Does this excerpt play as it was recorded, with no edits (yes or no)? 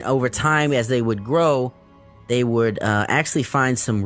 yes